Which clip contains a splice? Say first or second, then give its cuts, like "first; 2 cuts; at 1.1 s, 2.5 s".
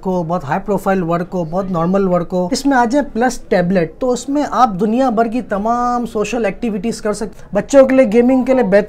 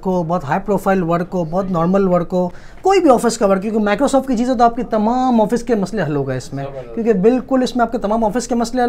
first; 2 cuts; at 2.5 s, 7.3 s